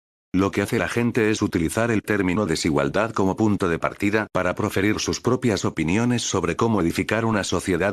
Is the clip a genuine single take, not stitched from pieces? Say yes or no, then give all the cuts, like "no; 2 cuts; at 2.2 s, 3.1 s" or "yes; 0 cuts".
no; 1 cut; at 2.5 s